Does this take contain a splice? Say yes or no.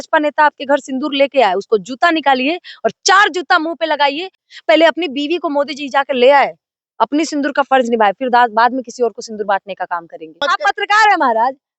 yes